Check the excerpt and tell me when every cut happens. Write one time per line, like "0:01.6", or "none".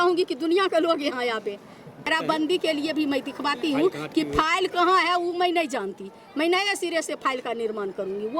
0:02.1

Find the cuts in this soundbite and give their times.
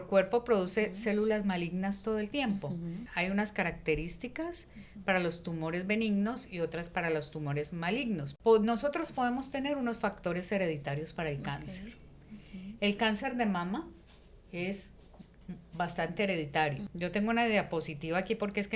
0:03.0
0:08.3
0:16.9

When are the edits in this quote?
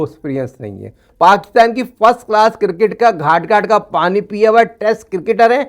0:01.0

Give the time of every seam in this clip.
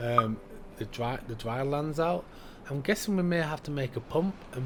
none

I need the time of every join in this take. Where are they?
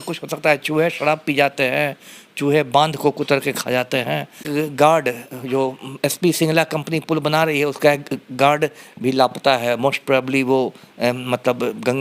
0:04.5

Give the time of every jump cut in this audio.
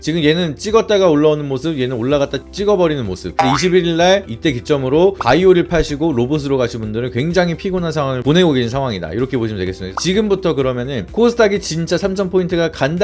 0:03.3
0:10.0

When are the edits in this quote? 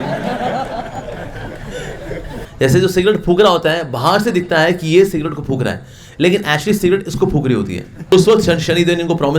0:02.5
0:08.1

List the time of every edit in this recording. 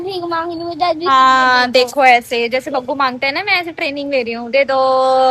none

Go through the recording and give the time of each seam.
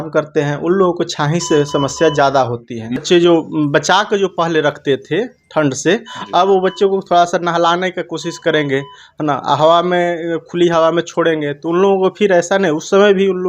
0:03.0

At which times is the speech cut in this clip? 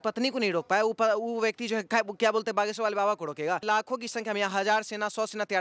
0:03.6

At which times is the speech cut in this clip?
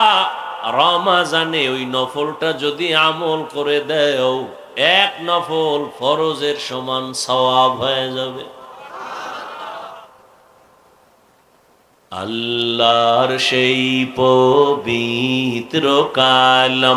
none

